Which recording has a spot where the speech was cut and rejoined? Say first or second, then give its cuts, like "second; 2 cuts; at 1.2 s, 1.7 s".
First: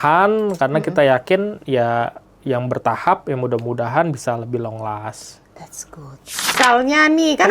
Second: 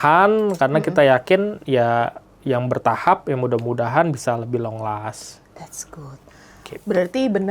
first; 1 cut; at 6.6 s